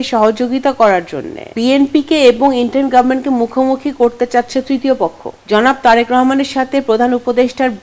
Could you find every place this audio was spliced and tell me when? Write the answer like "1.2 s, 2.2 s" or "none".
1.5 s, 5.3 s